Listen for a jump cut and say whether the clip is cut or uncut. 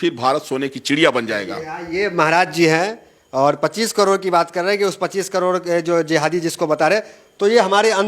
uncut